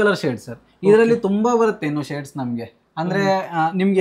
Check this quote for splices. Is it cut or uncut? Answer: uncut